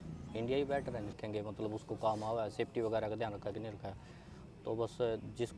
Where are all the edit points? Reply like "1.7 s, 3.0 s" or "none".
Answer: 1.2 s